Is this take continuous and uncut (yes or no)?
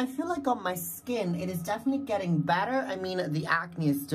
yes